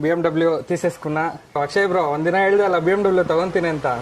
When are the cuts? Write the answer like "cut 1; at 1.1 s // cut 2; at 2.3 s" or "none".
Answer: cut 1; at 1.6 s